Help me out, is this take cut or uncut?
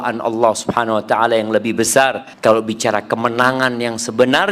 cut